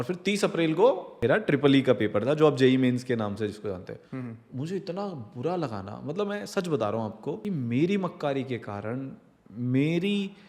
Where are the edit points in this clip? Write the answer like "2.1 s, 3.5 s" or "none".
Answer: 1.1 s, 7.4 s